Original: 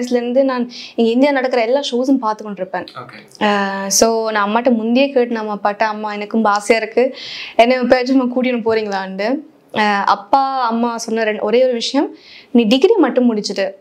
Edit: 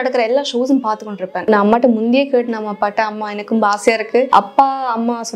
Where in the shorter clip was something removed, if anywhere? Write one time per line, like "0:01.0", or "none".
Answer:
0:01.5
0:04.3